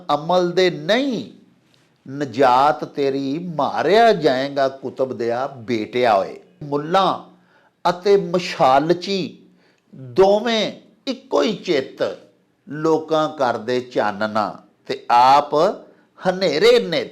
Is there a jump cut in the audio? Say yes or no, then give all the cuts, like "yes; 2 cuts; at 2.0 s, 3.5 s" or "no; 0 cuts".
yes; 1 cut; at 6.6 s